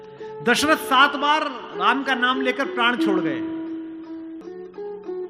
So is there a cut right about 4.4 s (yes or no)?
yes